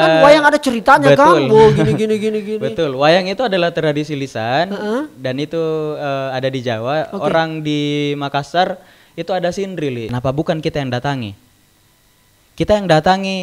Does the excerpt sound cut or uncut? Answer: cut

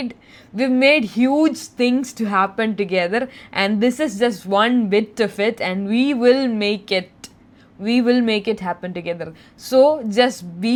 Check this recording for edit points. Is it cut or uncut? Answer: uncut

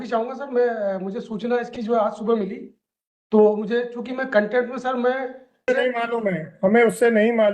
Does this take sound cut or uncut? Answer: cut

